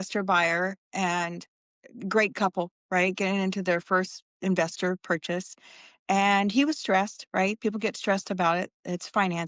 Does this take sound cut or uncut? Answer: uncut